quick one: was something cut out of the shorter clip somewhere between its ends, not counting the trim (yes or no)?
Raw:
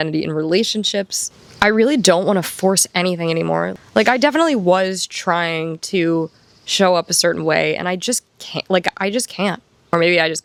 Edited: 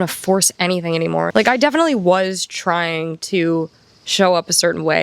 yes